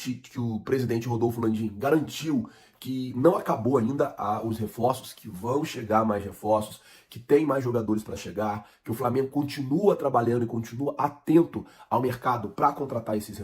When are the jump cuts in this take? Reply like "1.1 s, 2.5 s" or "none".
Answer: none

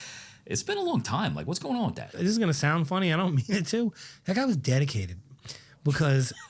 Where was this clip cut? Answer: 2.1 s

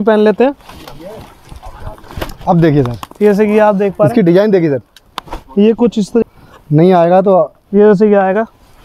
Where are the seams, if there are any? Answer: 6.2 s

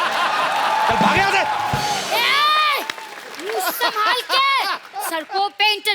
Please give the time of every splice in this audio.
2.1 s, 4.9 s

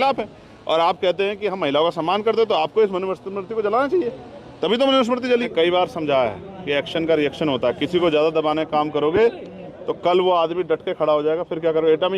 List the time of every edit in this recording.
5.5 s

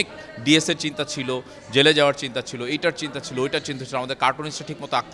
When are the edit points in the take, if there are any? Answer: none

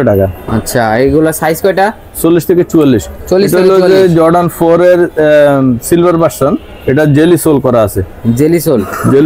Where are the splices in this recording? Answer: none

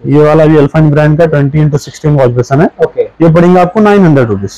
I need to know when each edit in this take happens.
none

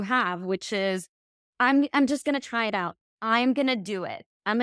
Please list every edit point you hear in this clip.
none

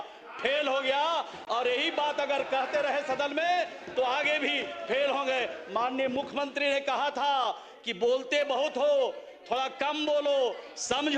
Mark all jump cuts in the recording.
none

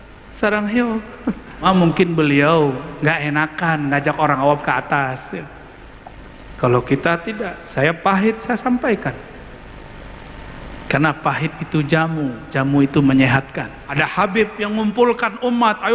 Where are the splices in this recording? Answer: 1.6 s, 13.8 s

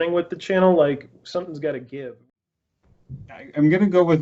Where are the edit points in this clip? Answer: 2.3 s

